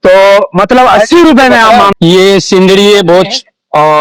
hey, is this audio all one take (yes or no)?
no